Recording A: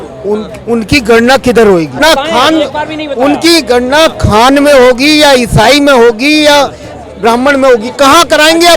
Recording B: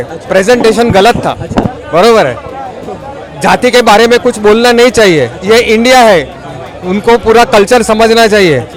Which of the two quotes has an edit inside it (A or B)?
A